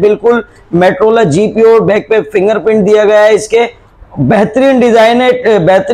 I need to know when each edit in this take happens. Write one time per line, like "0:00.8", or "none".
none